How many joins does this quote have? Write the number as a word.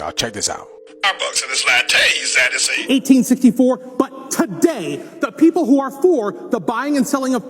one